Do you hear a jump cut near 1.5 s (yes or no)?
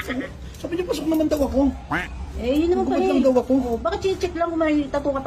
no